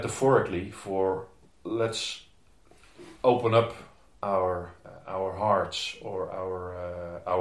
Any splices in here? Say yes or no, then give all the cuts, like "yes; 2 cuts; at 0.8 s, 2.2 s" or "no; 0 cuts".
yes; 1 cut; at 4.8 s